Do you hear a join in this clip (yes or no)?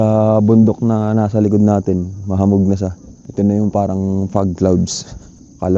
no